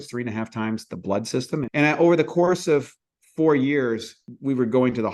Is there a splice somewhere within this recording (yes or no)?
yes